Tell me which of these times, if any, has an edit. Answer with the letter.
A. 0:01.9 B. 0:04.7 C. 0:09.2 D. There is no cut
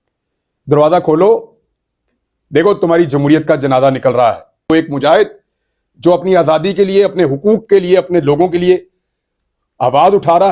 B